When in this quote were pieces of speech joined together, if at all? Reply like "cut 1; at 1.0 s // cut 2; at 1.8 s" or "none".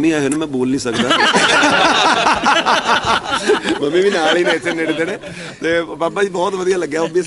none